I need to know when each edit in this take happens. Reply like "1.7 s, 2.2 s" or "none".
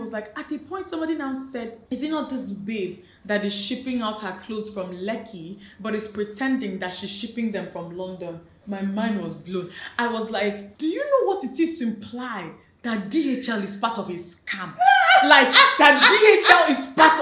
10.7 s